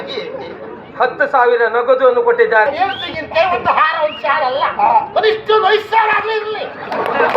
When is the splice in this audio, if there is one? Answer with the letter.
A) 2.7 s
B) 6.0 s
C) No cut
A